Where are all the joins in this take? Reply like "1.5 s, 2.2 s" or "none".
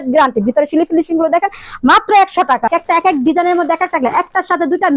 2.7 s